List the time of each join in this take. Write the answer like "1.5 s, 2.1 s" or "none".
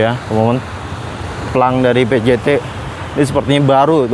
none